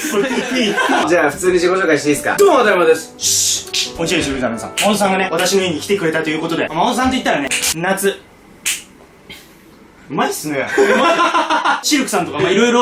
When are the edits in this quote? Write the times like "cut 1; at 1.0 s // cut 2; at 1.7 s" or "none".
cut 1; at 4.0 s